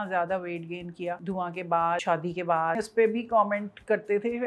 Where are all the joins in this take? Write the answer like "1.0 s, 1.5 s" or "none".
1.2 s, 2.0 s, 2.8 s